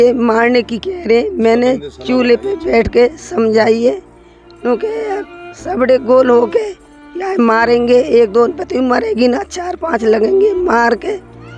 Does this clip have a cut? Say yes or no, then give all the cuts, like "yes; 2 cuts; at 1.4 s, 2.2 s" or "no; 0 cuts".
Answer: no; 0 cuts